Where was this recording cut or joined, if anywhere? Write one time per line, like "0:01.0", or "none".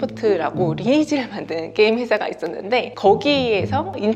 none